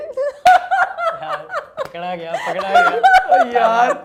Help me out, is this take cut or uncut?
uncut